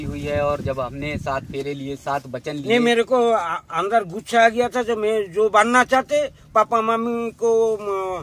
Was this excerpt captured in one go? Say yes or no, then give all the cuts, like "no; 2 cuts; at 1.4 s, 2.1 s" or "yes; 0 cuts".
yes; 0 cuts